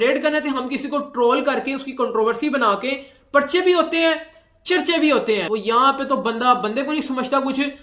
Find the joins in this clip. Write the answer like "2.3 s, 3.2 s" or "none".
5.4 s